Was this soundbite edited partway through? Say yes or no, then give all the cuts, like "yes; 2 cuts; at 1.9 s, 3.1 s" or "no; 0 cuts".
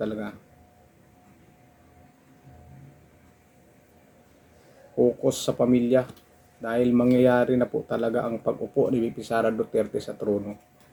no; 0 cuts